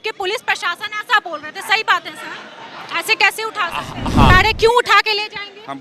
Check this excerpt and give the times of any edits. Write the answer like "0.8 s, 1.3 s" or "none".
4.3 s